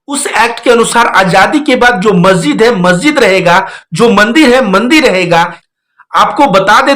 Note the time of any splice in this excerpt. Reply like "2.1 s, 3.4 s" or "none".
5.6 s